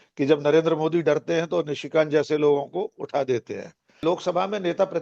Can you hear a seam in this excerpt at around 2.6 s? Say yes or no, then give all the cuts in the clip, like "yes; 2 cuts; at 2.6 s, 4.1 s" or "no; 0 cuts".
no; 1 cut; at 4.0 s